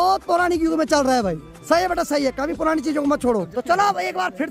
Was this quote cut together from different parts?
no; 0 cuts

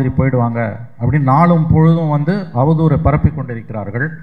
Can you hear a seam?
no; 0 cuts

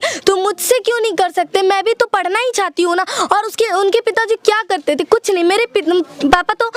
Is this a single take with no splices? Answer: yes; 0 cuts

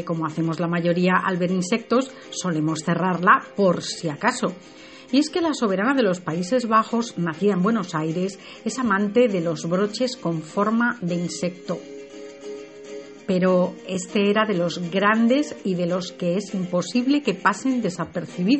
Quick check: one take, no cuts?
yes; 0 cuts

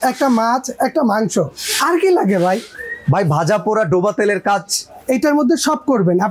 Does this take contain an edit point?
no; 0 cuts

